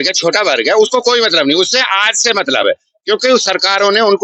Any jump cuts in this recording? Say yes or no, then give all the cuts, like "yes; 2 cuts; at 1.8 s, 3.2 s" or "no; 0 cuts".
no; 0 cuts